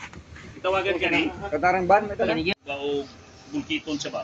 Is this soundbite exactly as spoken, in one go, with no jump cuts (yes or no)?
no